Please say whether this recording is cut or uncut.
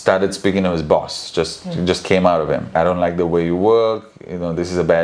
cut